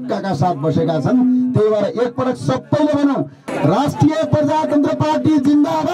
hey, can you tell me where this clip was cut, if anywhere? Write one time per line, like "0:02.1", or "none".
0:03.5